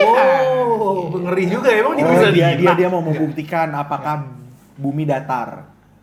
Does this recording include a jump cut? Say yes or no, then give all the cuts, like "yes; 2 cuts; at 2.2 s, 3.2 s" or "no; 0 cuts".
no; 0 cuts